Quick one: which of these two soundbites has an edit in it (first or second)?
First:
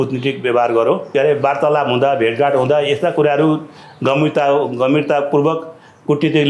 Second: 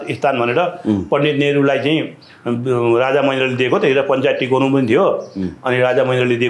first